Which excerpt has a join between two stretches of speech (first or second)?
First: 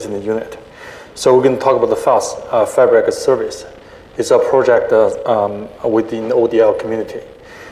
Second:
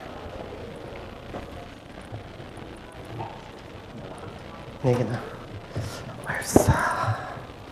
second